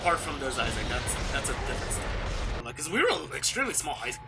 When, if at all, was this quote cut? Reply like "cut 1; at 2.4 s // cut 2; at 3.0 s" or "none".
cut 1; at 2.6 s